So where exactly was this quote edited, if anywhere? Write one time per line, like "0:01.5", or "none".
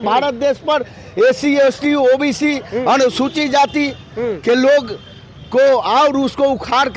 none